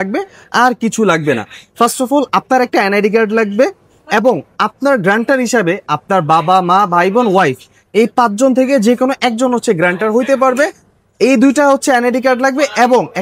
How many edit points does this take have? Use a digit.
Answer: 0